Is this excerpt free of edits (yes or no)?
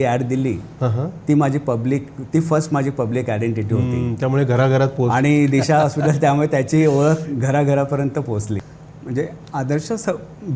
no